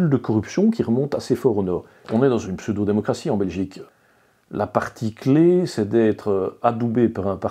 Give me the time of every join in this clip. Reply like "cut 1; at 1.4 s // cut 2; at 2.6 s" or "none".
cut 1; at 2.1 s // cut 2; at 3.8 s